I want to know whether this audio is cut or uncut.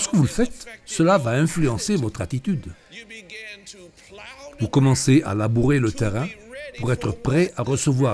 cut